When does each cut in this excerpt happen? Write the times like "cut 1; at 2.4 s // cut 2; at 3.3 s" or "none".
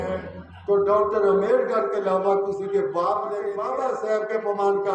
cut 1; at 3.6 s